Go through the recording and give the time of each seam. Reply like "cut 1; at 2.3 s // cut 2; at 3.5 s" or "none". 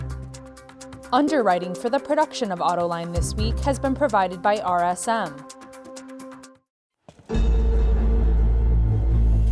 cut 1; at 1.1 s // cut 2; at 5.3 s // cut 3; at 6.4 s